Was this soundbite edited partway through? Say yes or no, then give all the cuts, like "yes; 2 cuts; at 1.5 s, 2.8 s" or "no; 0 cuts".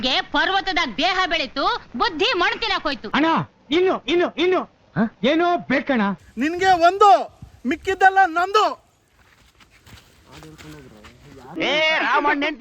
yes; 2 cuts; at 3.0 s, 6.2 s